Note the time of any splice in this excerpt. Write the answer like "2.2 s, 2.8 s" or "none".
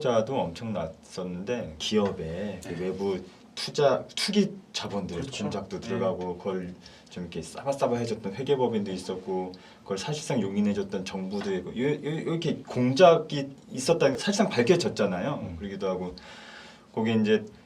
1.8 s, 14.1 s